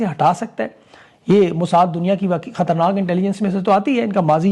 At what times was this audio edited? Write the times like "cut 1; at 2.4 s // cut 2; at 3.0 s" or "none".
none